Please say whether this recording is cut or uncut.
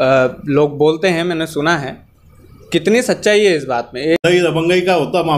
cut